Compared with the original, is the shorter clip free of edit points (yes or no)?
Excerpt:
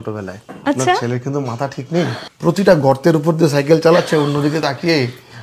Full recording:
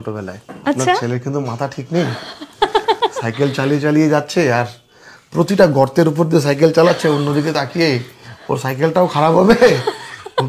no